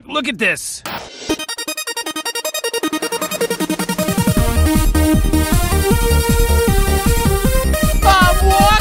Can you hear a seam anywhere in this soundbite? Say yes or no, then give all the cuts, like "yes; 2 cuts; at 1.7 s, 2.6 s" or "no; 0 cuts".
yes; 1 cut; at 7.5 s